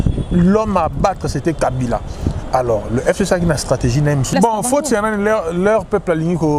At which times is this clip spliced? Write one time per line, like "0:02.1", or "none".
0:04.3